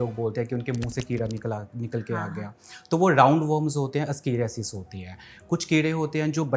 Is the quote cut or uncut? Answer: uncut